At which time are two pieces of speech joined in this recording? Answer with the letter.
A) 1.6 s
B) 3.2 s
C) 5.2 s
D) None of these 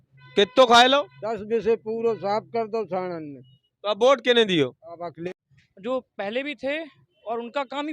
C